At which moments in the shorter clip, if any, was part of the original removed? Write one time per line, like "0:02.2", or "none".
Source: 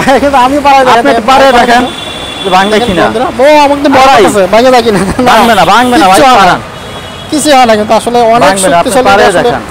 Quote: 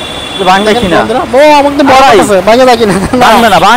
none